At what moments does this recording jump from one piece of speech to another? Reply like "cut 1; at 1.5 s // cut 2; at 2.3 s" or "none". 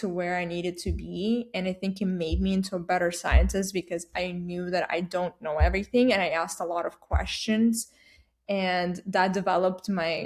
none

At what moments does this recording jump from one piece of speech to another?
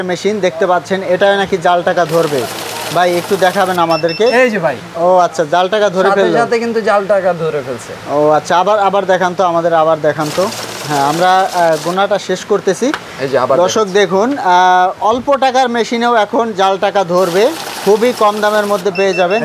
none

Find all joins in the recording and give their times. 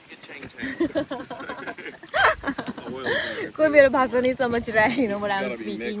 none

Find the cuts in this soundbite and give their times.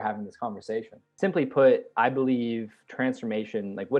cut 1; at 1.0 s

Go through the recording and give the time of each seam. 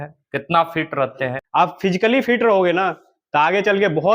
cut 1; at 1.4 s

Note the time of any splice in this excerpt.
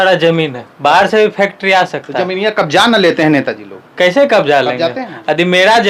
none

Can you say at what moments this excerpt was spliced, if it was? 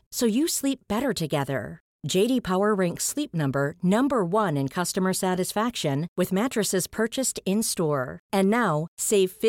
none

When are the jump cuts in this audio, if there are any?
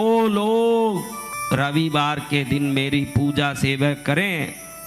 cut 1; at 1.3 s

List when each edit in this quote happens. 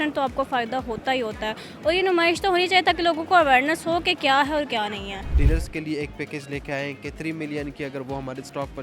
cut 1; at 5.4 s

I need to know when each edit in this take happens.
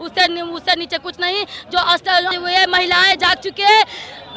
cut 1; at 2.3 s

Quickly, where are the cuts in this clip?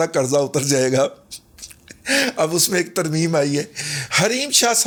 none

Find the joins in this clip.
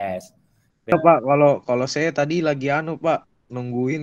cut 1; at 0.9 s

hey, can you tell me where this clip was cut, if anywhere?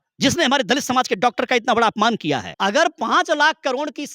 cut 1; at 2.5 s

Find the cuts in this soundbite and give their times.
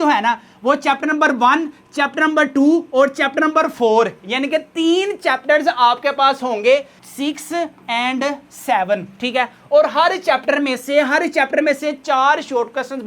cut 1; at 7.0 s

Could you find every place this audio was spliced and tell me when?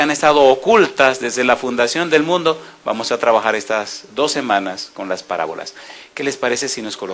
cut 1; at 3.2 s

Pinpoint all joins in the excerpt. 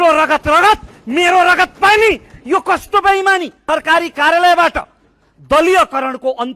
cut 1; at 3.6 s

